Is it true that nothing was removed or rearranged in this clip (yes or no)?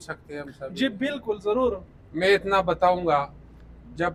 yes